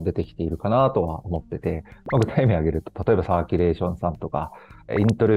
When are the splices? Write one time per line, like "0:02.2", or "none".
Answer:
none